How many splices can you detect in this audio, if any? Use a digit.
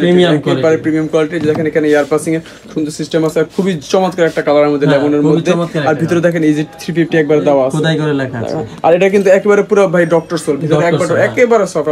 0